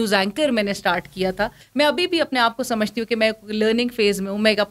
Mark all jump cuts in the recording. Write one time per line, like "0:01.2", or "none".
0:01.6